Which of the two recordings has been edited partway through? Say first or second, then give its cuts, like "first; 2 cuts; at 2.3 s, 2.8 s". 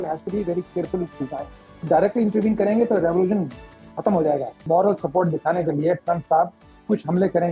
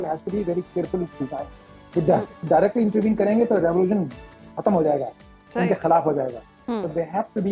first; 2 cuts; at 1.7 s, 4.6 s